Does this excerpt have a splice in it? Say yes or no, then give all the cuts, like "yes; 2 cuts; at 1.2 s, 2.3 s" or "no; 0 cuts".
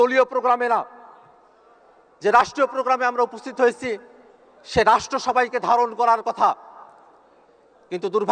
no; 0 cuts